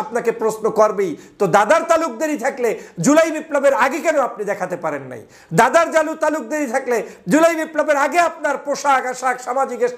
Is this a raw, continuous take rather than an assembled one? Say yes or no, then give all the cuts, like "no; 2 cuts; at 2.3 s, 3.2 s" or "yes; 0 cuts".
yes; 0 cuts